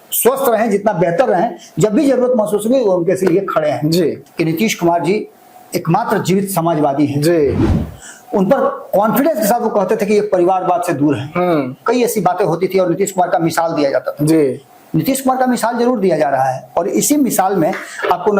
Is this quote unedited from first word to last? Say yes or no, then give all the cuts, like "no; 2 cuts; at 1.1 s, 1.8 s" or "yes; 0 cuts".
no; 1 cut; at 4.2 s